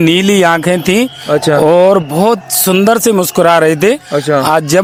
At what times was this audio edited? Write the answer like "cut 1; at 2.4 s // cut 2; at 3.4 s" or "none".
none